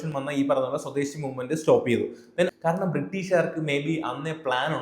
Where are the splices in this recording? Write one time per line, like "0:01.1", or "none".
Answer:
0:02.5